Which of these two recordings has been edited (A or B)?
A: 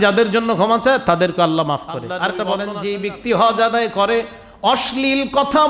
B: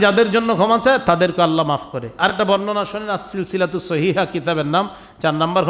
A